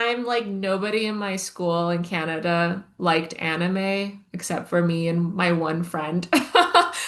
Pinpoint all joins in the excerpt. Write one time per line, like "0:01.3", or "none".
none